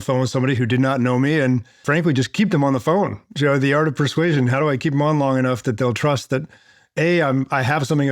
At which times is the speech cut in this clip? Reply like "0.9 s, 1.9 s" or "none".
1.8 s